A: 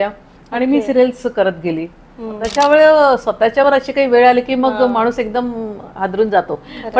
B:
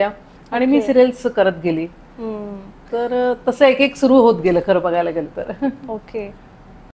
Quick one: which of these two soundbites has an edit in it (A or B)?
A